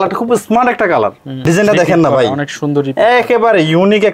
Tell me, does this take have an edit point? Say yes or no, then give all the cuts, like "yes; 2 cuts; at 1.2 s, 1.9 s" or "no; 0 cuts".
yes; 1 cut; at 1.3 s